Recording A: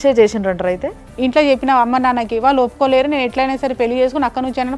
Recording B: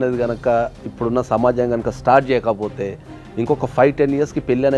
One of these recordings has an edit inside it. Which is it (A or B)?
A